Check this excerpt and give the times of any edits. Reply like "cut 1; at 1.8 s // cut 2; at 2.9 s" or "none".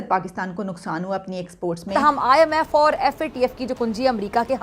cut 1; at 1.8 s